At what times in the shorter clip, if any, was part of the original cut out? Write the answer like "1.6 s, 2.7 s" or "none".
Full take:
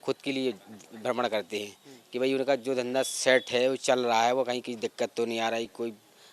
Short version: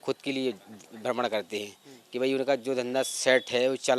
none